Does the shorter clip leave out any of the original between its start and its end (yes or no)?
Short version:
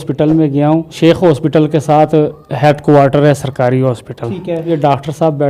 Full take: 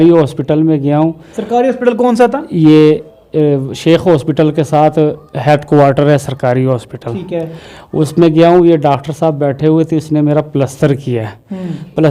yes